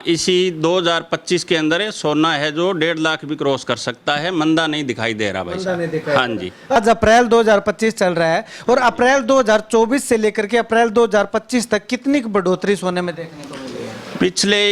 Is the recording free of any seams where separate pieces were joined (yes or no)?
no